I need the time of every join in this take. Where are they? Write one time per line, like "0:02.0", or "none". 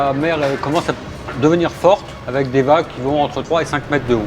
0:02.2
0:03.4